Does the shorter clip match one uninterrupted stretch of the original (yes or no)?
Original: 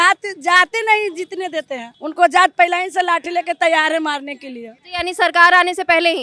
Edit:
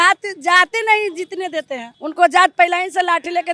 yes